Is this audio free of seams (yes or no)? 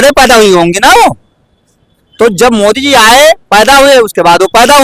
yes